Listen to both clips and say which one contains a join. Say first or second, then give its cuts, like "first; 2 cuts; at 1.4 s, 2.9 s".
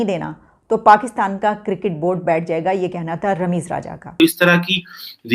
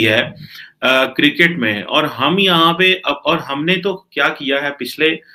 first; 1 cut; at 4.1 s